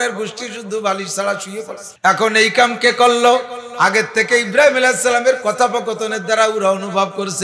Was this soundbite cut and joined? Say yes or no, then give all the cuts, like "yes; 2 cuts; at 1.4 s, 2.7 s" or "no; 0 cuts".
yes; 1 cut; at 1.8 s